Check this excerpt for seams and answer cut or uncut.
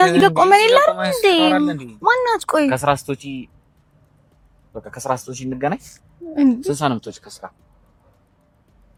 uncut